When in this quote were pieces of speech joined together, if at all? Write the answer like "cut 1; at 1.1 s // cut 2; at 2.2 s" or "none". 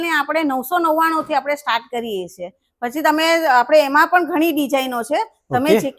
none